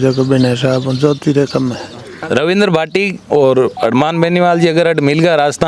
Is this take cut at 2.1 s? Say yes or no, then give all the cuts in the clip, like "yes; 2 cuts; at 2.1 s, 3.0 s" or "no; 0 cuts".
yes; 1 cut; at 2.1 s